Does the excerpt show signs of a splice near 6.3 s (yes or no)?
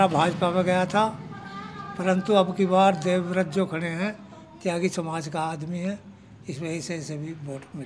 no